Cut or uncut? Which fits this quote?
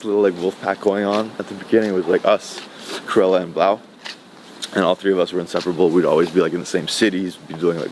uncut